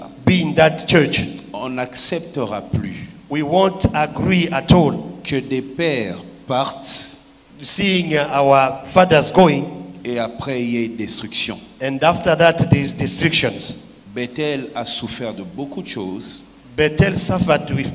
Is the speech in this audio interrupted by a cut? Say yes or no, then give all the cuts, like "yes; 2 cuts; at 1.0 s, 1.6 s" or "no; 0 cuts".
no; 0 cuts